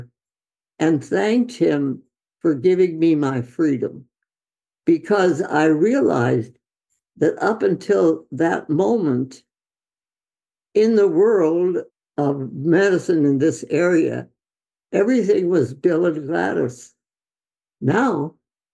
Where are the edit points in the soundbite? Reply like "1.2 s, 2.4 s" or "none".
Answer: 11.9 s